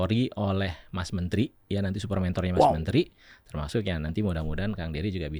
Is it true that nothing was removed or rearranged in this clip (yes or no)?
yes